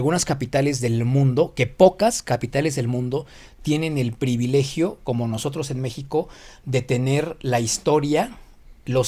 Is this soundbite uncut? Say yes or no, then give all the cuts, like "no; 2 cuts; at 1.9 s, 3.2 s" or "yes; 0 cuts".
yes; 0 cuts